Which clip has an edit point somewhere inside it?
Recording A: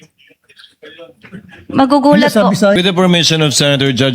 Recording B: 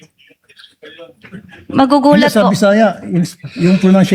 A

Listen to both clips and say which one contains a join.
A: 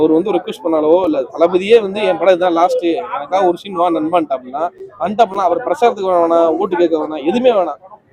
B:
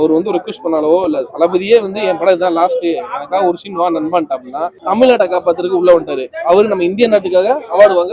B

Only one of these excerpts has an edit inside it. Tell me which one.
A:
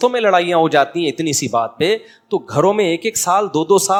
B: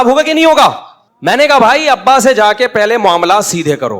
B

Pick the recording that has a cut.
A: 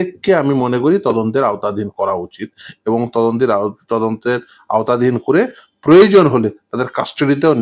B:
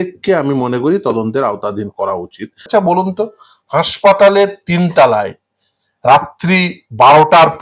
B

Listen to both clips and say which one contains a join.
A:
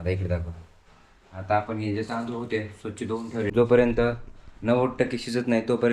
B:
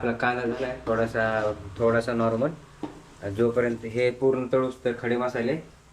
A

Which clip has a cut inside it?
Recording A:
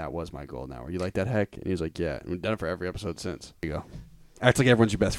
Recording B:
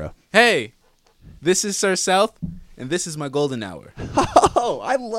A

